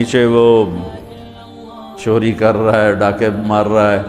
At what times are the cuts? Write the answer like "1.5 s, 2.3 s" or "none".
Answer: none